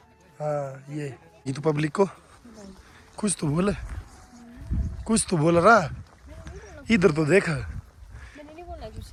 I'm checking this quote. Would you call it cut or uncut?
uncut